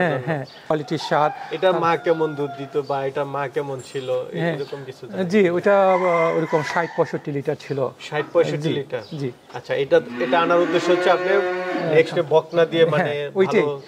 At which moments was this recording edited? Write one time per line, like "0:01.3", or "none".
none